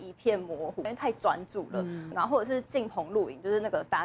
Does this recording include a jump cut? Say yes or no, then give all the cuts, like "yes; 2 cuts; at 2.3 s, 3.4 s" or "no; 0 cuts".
yes; 2 cuts; at 0.9 s, 2.1 s